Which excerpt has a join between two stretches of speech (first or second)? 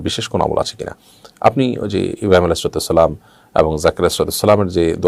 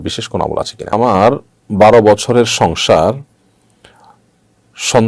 second